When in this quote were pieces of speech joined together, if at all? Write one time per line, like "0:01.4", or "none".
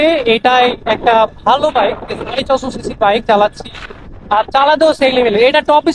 none